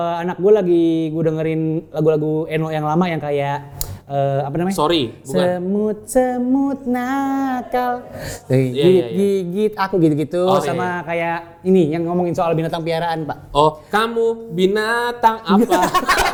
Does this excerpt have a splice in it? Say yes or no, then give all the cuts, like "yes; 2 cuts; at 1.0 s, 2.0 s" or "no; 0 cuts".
no; 0 cuts